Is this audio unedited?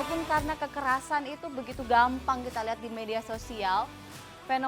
yes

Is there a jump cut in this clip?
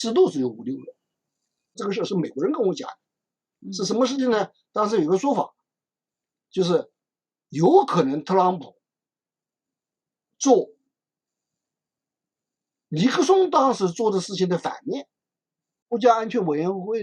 yes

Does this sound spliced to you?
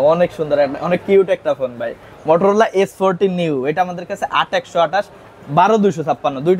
no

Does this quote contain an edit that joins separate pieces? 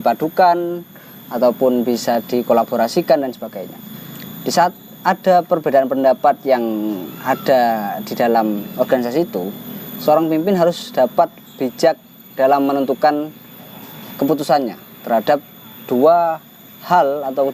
no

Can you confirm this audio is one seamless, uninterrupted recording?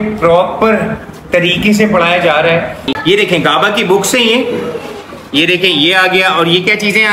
no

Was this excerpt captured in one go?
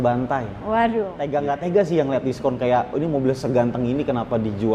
no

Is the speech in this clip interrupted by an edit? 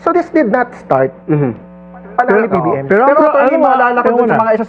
no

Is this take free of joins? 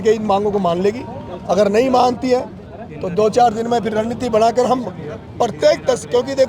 yes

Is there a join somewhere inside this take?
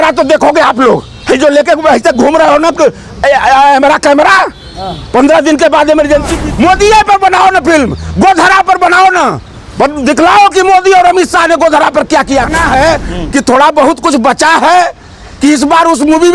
yes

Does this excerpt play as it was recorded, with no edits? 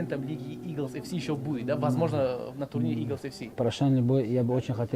no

